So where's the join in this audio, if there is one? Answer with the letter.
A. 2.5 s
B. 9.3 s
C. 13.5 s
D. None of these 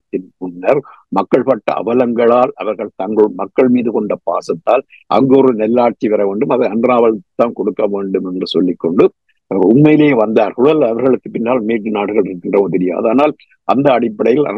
D